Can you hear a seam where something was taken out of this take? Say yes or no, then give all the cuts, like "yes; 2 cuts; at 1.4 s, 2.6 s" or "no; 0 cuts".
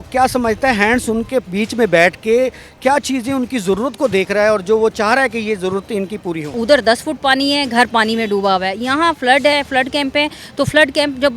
yes; 1 cut; at 6.5 s